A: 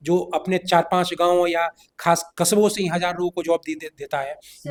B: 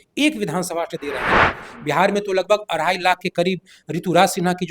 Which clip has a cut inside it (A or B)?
B